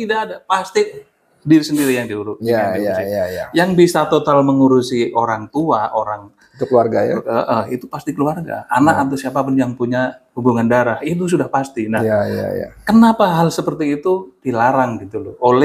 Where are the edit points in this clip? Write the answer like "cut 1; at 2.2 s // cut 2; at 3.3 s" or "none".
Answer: none